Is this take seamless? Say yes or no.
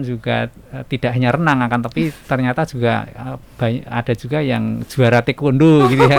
yes